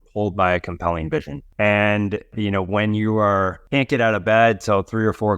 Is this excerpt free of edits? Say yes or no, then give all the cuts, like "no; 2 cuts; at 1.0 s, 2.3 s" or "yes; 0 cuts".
no; 3 cuts; at 1.4 s, 2.3 s, 3.6 s